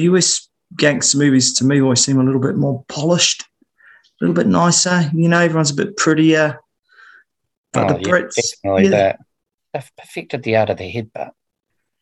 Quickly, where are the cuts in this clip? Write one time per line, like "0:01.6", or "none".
0:09.5